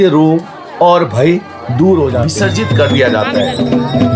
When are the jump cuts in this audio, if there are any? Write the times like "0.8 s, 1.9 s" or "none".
2.3 s